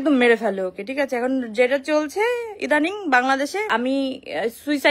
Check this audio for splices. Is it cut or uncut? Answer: cut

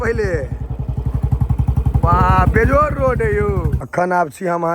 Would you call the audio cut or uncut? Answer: cut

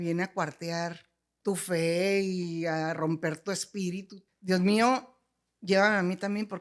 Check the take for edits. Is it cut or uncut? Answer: cut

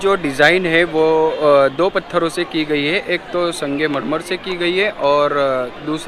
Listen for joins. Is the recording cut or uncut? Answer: uncut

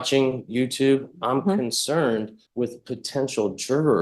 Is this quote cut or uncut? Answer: cut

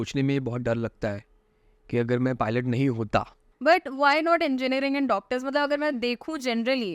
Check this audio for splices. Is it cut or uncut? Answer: cut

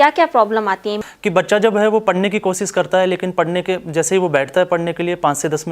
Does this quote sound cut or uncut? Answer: cut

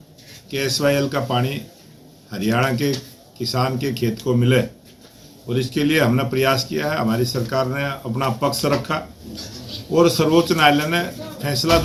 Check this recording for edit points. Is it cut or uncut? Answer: uncut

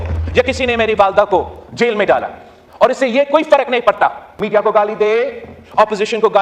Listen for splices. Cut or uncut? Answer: cut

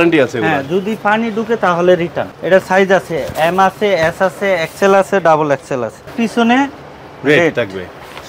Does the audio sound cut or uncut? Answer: cut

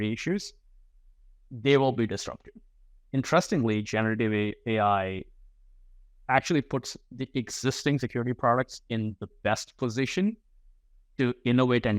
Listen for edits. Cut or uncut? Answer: uncut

